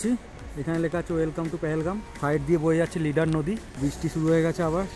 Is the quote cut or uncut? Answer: cut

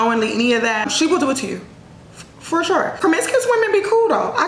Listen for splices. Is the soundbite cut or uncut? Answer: cut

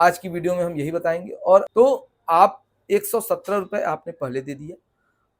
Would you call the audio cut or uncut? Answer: cut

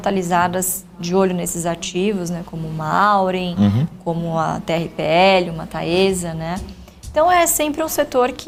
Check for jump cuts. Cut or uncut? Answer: uncut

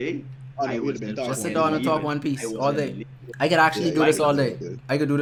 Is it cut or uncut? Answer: uncut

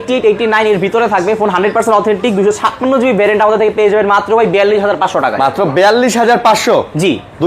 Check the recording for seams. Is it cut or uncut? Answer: uncut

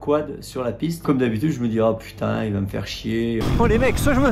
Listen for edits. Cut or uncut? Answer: cut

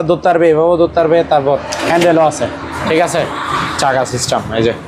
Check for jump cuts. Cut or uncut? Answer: uncut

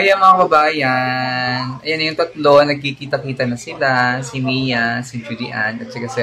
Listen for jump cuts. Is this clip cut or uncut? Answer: uncut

